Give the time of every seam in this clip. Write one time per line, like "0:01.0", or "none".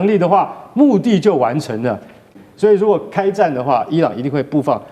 0:02.3